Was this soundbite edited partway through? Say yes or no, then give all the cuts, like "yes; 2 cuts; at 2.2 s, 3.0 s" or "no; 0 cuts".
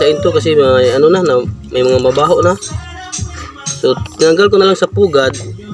no; 0 cuts